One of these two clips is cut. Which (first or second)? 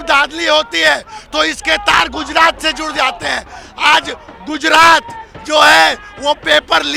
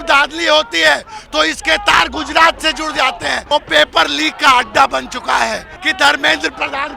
second